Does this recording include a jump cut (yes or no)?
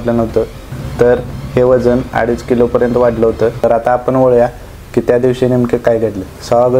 yes